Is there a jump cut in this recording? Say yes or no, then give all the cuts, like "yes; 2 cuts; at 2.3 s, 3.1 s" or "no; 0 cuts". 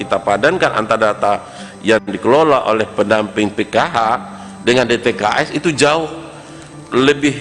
no; 0 cuts